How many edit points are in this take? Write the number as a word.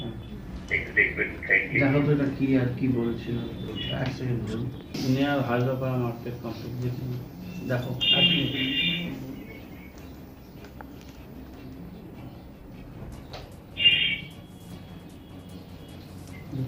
one